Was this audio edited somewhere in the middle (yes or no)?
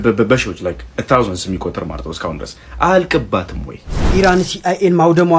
yes